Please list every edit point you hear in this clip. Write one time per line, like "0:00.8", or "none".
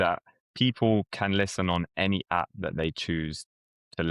none